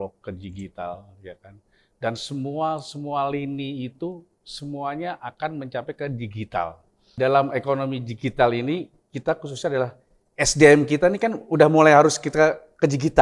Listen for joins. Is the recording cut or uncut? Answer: cut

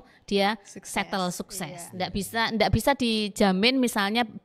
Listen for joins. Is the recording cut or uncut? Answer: uncut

